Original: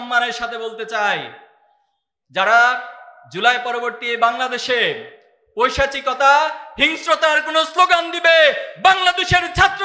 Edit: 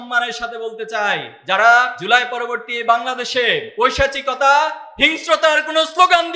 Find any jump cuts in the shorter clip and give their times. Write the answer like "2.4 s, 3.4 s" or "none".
1.3 s, 2.0 s, 3.7 s